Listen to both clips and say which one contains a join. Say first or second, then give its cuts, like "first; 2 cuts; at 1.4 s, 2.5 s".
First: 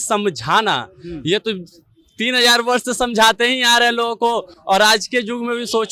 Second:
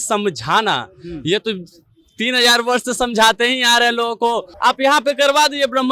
second; 1 cut; at 4.5 s